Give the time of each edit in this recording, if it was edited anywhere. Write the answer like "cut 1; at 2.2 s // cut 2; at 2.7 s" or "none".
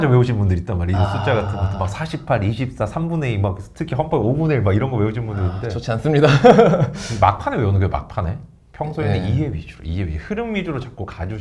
none